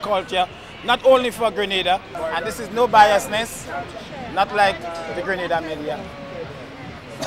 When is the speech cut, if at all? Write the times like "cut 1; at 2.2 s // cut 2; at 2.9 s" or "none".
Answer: cut 1; at 2.1 s